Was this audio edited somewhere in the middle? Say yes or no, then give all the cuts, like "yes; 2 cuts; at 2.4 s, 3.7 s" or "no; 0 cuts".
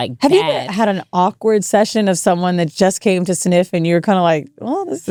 no; 0 cuts